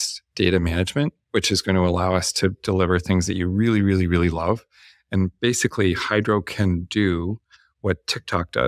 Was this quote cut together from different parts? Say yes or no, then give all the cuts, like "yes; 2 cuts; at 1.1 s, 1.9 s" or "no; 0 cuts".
no; 0 cuts